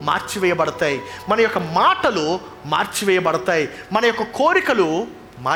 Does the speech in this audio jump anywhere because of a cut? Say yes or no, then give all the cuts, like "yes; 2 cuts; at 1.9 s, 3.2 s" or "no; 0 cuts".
no; 0 cuts